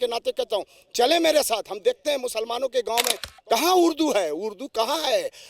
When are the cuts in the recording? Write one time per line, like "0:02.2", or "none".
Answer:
0:03.2